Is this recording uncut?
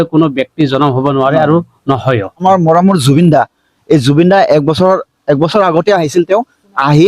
no; 1 cut; at 2.4 s

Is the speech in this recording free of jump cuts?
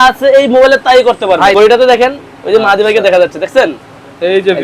no; 1 cut; at 1.5 s

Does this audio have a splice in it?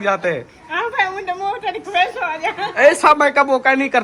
no; 0 cuts

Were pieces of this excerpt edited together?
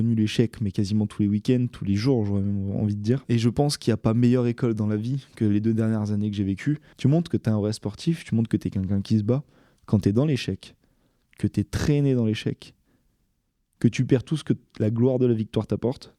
yes; 2 cuts; at 3.2 s, 6.9 s

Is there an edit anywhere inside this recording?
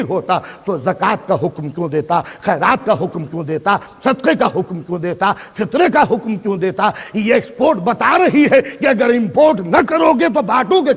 no; 0 cuts

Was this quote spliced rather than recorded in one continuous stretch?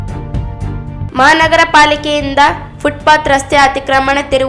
yes; 1 cut; at 0.9 s

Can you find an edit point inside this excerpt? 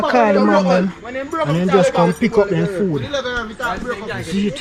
no; 0 cuts

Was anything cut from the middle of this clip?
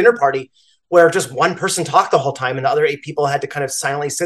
no; 0 cuts

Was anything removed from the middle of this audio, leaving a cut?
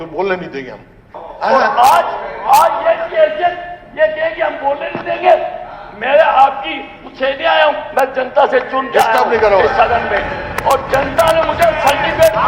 yes; 1 cut; at 1.0 s

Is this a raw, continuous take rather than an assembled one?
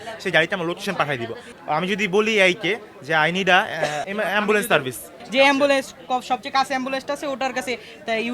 no; 3 cuts; at 1.4 s, 4.0 s, 5.2 s

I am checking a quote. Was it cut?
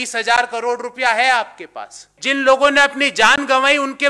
yes; 1 cut; at 2.2 s

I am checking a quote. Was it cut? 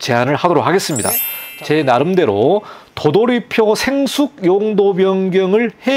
yes; 1 cut; at 1.3 s

